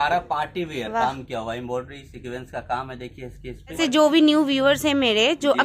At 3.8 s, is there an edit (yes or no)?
yes